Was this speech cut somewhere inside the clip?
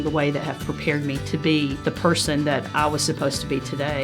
yes; 1 cut; at 1.8 s

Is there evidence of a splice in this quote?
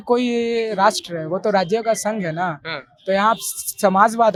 no; 0 cuts

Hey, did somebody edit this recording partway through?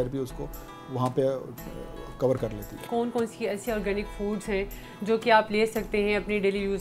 yes; 1 cut; at 2.8 s

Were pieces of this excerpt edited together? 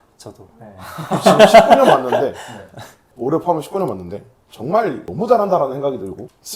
no; 0 cuts

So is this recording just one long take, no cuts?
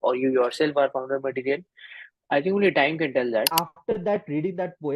no; 1 cut; at 3.5 s

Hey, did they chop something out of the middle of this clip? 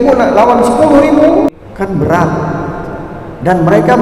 yes; 1 cut; at 1.5 s

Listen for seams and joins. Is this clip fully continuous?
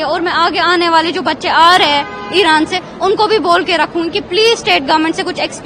yes; 0 cuts

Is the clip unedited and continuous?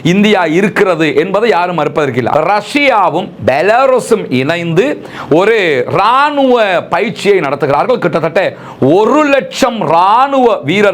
no; 1 cut; at 2.3 s

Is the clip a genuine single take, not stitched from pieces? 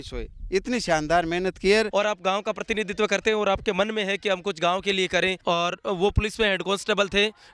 no; 2 cuts; at 1.9 s, 5.4 s

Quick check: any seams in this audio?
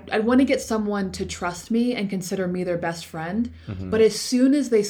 no; 0 cuts

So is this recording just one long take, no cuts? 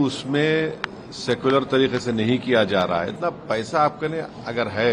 no; 1 cut; at 3.1 s

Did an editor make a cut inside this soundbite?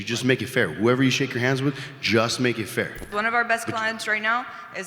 yes; 1 cut; at 3.1 s

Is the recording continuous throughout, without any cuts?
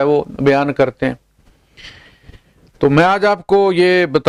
yes; 0 cuts

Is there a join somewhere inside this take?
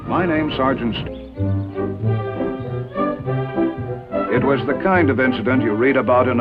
no; 0 cuts

